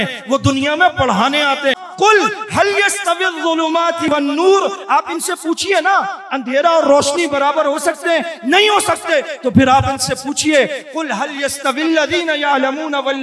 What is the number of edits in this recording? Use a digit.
1